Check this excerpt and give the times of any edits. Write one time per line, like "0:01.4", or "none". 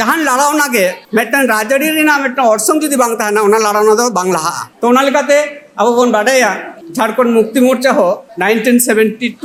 none